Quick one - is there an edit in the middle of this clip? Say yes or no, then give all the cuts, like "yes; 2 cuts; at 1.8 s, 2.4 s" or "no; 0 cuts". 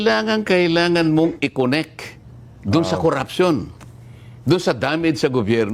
no; 0 cuts